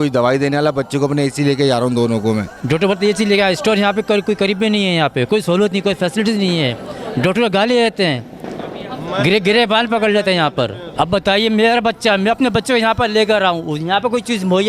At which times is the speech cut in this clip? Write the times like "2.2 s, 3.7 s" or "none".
none